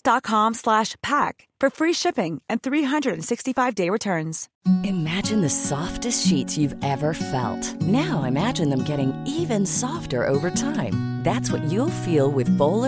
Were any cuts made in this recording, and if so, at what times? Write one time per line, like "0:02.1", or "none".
0:04.4